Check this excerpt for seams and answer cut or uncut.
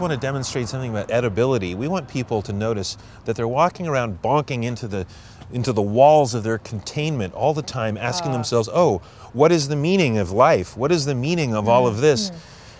cut